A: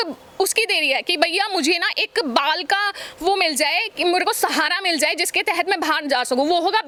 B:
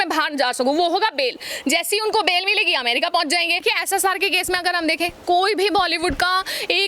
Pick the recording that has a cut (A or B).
B